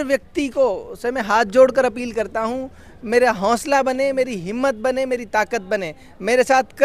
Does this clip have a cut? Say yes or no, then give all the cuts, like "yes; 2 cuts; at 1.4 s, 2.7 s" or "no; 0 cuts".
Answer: no; 0 cuts